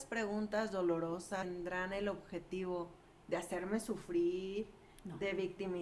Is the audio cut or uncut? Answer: cut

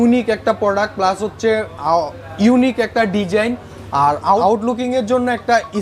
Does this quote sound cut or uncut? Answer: uncut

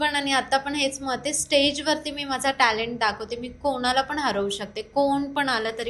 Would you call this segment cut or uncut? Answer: uncut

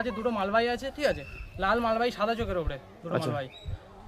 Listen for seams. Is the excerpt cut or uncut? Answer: uncut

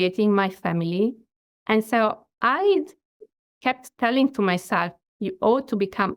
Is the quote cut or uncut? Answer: cut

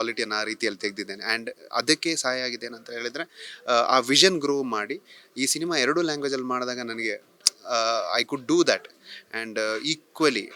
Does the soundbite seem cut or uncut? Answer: uncut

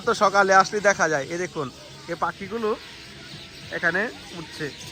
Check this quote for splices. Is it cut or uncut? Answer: uncut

